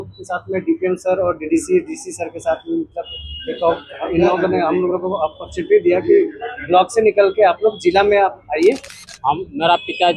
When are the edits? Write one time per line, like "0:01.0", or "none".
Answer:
0:08.9